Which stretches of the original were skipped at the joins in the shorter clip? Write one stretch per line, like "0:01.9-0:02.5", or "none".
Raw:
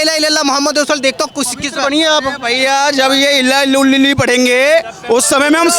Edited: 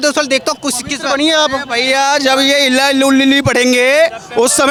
none